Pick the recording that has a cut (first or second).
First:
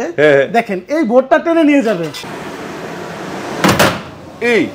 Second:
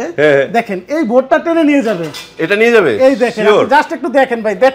first